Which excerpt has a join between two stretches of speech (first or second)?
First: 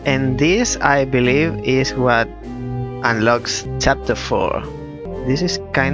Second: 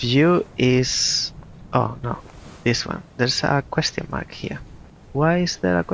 first